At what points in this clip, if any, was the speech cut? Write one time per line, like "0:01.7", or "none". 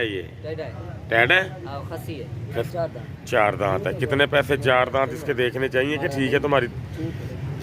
0:02.7